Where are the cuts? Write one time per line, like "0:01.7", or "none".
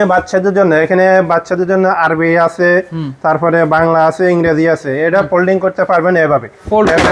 none